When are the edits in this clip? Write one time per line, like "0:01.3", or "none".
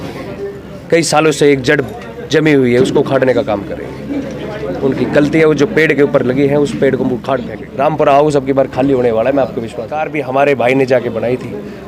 0:07.6
0:10.1